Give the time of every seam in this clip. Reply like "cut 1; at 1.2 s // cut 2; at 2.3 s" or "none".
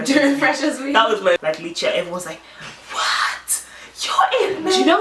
cut 1; at 1.4 s